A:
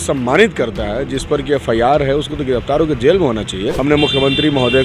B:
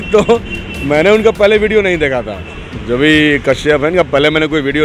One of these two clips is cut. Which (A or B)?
A